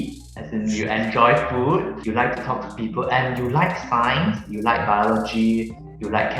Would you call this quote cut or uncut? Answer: cut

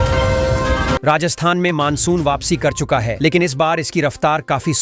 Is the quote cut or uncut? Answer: cut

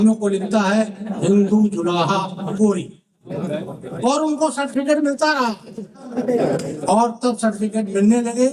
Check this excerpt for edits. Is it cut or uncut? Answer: cut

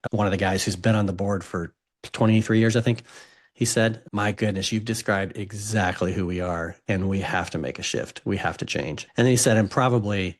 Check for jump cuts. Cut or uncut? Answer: cut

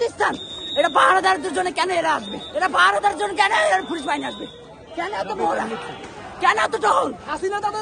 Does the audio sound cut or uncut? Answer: cut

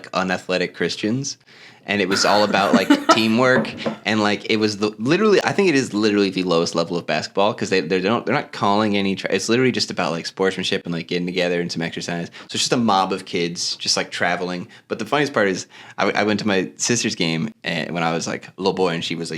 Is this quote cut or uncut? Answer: uncut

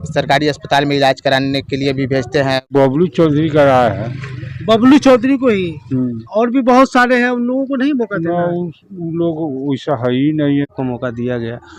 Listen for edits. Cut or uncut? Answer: cut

